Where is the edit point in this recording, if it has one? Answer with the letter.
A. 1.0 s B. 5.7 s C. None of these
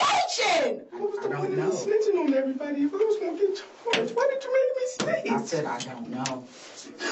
A